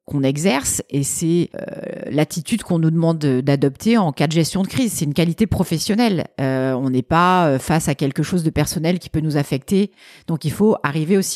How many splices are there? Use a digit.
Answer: 0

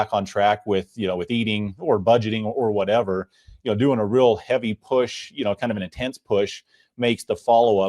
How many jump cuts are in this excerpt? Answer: 0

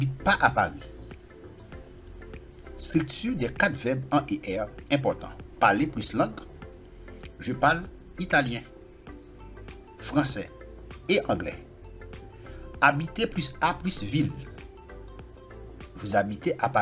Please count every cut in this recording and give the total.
2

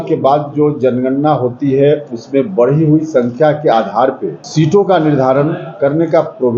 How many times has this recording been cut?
1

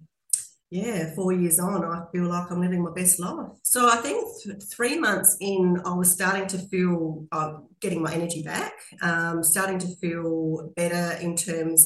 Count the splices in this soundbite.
1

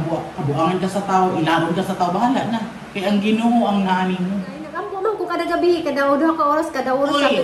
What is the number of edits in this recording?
1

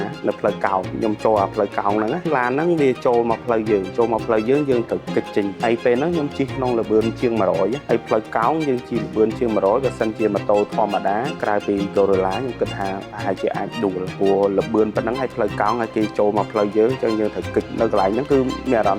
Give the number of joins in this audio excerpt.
4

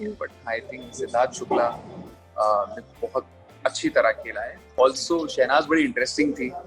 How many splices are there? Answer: 1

